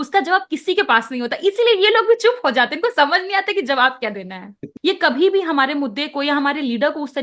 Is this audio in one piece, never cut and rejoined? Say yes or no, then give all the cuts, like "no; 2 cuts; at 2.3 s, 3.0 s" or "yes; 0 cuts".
no; 1 cut; at 4.7 s